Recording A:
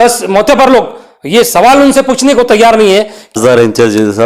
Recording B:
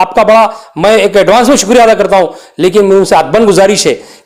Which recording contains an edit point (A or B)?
A